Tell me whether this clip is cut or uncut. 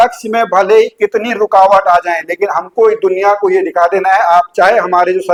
uncut